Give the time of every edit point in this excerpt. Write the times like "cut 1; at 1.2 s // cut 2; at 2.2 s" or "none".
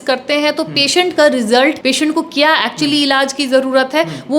cut 1; at 1.8 s